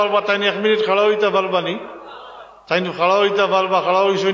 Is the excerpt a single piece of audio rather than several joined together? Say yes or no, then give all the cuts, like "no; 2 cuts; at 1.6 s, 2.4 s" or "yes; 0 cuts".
yes; 0 cuts